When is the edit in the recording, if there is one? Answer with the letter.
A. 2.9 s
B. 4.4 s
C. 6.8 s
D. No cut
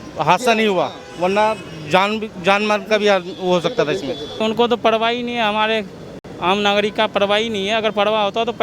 B